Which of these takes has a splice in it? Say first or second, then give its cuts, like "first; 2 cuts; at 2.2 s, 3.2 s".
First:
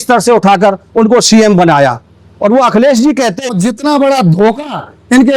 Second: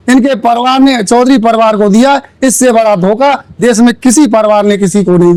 first; 1 cut; at 3.4 s